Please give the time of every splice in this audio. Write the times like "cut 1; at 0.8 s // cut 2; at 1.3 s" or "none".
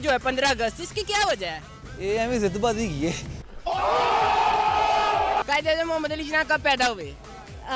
cut 1; at 5.5 s